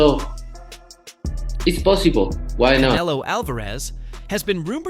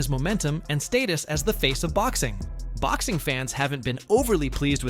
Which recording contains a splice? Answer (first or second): first